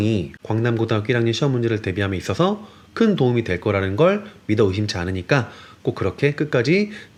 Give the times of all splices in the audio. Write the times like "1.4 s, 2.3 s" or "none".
none